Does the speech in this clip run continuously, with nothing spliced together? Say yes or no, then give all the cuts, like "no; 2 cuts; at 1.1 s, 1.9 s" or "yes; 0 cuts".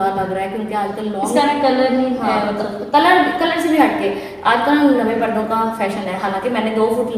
yes; 0 cuts